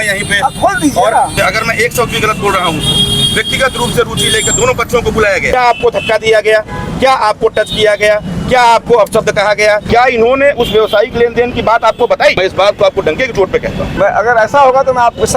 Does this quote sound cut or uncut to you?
cut